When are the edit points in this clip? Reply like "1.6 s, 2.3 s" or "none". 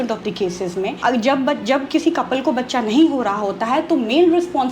0.9 s